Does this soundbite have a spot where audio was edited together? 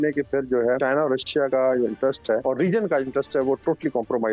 yes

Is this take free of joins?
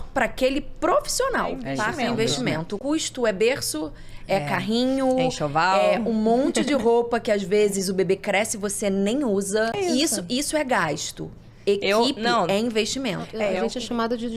no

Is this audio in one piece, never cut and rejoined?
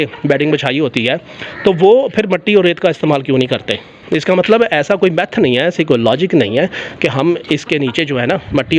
yes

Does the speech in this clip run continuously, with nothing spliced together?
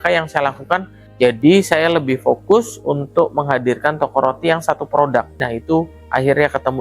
no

